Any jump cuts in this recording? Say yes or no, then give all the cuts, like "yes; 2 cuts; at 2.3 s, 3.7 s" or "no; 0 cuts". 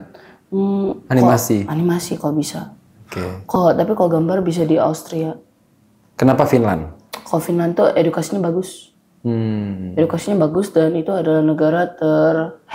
no; 0 cuts